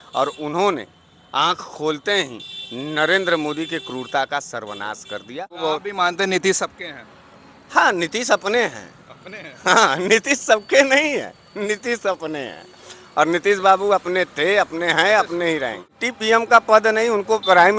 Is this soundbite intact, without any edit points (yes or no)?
no